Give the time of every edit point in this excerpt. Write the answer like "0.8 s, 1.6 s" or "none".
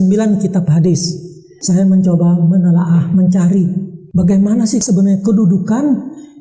none